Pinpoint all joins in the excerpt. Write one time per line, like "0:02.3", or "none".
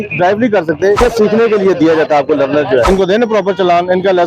0:01.0
0:02.9